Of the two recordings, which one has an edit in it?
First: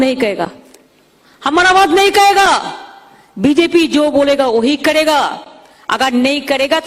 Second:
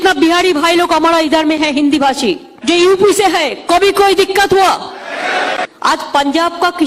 second; 2 cuts; at 2.5 s, 5.7 s

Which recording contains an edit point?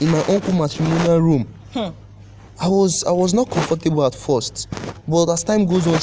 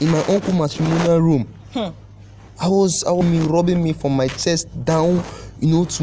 second; 1 cut; at 3.2 s

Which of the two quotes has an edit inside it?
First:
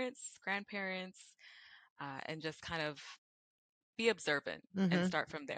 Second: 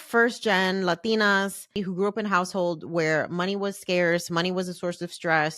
second; 1 cut; at 1.8 s

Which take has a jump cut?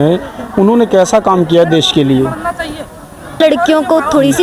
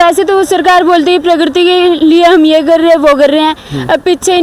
first; 1 cut; at 3.4 s

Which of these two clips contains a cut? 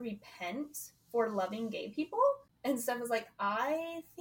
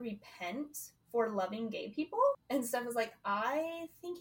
second; 1 cut; at 2.4 s

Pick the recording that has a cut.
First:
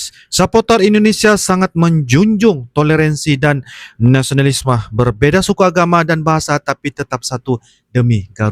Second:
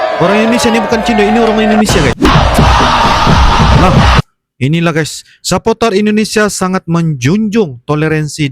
second; 1 cut; at 2.2 s

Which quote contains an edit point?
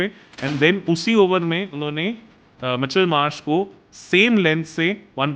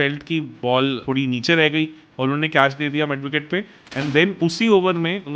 second; 1 cut; at 1.0 s

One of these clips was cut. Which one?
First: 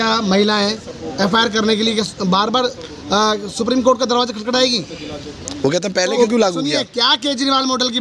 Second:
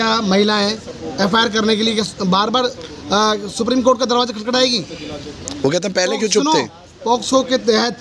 first; 1 cut; at 6.2 s

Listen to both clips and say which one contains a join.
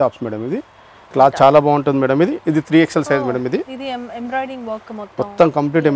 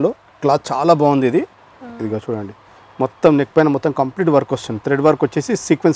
first; 1 cut; at 1.0 s

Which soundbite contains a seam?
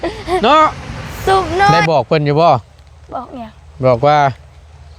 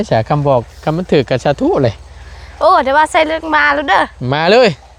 first; 1 cut; at 1.8 s

